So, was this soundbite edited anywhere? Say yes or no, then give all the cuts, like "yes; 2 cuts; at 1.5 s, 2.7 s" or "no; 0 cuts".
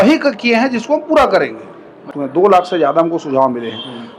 yes; 1 cut; at 2.1 s